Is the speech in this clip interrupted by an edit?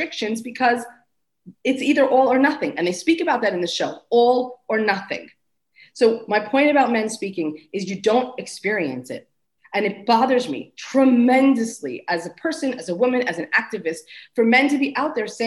no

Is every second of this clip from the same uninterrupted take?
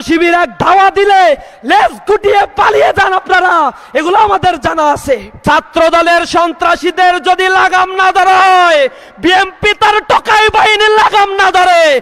no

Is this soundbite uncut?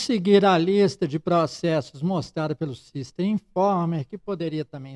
yes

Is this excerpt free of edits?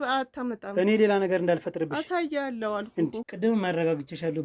no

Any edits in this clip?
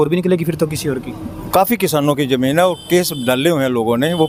no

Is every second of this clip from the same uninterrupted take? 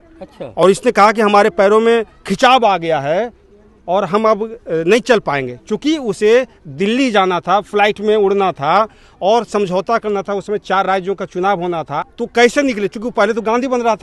no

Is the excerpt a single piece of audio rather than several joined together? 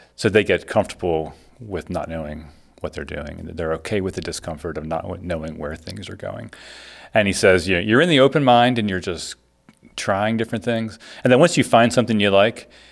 yes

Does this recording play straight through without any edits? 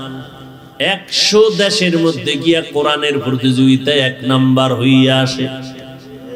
yes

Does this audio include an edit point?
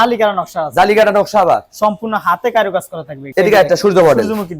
yes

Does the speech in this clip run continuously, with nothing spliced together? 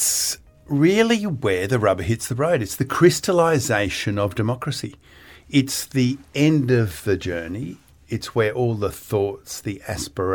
yes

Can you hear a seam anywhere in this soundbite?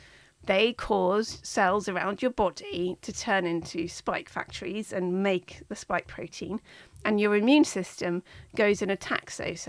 no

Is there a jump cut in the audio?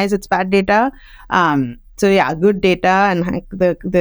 no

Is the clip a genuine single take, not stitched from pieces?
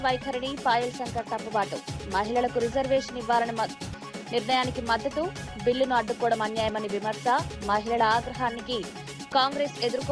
yes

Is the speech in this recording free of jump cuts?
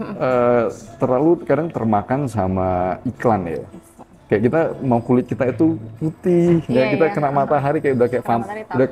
yes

